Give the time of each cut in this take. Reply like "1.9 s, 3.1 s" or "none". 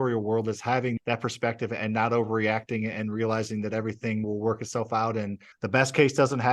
1.0 s, 4.3 s, 5.5 s